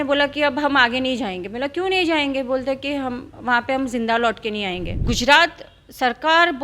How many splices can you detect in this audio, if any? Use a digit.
1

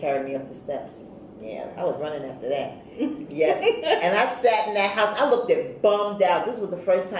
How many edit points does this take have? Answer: 1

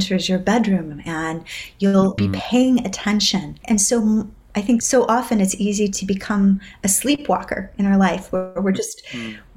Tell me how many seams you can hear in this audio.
3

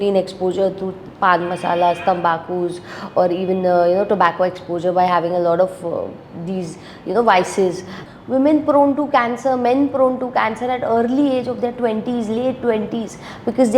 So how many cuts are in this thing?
1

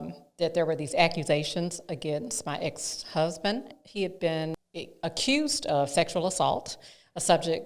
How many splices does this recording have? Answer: 2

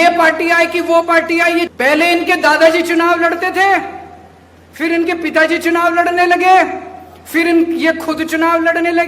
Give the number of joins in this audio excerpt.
1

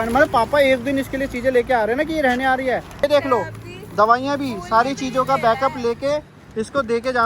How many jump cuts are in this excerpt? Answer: 1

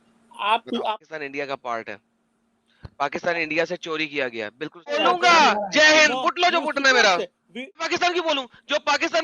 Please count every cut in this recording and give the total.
3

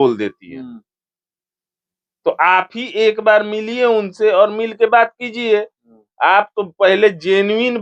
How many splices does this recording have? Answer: 0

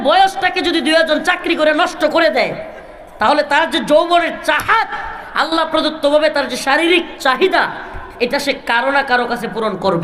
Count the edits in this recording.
0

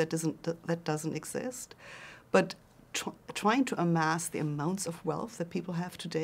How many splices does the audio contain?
0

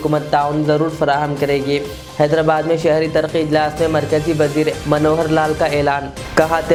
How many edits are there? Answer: 0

